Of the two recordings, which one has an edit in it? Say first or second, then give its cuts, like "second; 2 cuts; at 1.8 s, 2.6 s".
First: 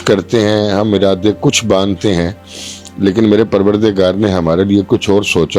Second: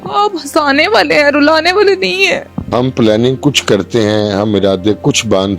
second; 1 cut; at 2.5 s